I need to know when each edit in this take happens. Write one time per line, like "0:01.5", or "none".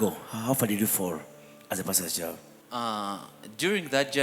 0:02.5